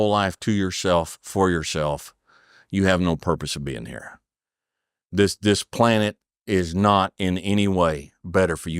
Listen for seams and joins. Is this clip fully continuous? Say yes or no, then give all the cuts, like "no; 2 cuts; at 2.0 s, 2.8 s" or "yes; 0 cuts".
yes; 0 cuts